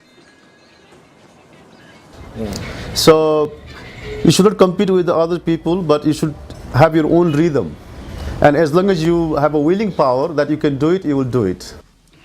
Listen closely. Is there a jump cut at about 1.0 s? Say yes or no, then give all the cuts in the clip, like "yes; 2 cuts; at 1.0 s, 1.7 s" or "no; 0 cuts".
yes; 1 cut; at 1.0 s